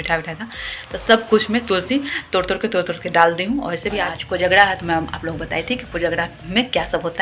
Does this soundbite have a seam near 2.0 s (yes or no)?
no